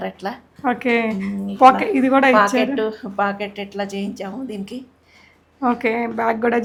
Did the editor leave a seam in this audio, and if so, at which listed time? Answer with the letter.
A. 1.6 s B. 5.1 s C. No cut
C